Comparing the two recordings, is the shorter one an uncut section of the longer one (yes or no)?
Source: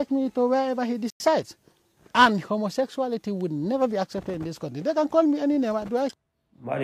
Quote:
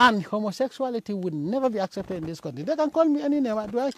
yes